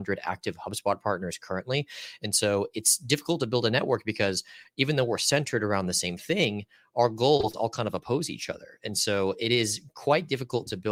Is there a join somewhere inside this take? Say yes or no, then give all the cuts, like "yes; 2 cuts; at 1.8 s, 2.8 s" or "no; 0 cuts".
no; 0 cuts